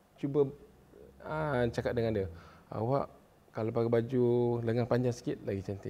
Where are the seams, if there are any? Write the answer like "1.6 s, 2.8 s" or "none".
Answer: none